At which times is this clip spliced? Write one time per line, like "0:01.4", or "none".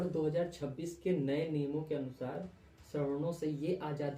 none